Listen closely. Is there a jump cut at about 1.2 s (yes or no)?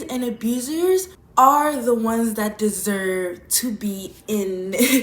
yes